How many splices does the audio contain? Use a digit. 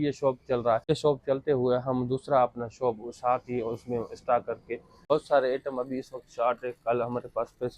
2